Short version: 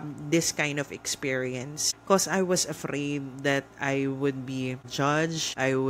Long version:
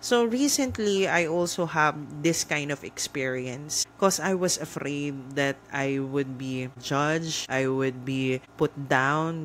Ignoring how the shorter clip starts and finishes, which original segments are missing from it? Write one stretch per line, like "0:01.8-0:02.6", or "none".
none